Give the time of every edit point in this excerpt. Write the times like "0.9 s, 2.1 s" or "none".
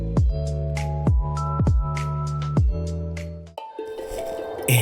none